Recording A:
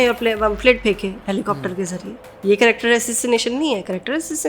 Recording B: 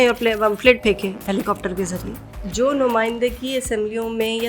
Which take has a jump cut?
B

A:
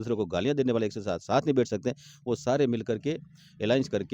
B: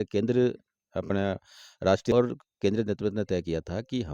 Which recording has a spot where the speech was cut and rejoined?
B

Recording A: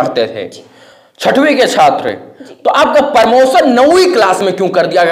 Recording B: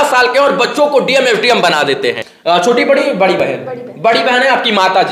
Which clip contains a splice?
B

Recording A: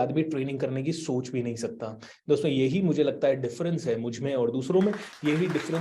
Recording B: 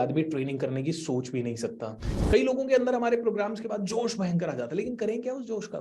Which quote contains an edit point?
B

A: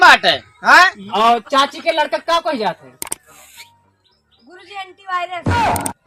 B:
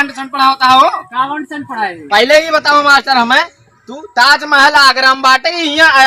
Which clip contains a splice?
A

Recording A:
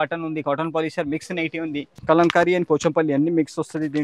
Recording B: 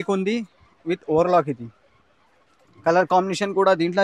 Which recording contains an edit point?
A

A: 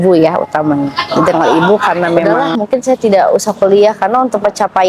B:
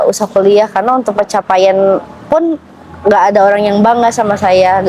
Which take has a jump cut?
A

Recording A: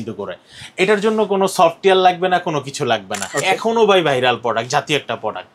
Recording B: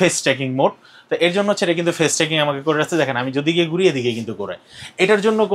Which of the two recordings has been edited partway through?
A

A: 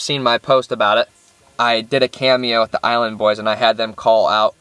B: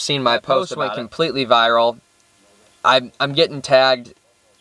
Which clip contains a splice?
A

